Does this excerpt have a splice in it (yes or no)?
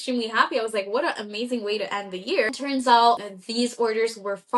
yes